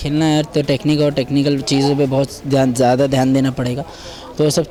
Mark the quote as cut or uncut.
uncut